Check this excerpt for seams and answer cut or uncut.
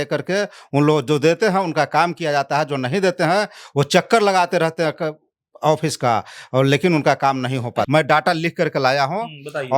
cut